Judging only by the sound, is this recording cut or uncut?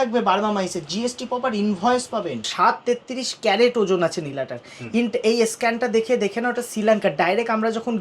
cut